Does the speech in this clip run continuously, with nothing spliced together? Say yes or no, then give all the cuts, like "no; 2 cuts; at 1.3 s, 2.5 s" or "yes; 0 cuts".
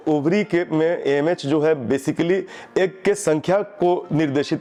yes; 0 cuts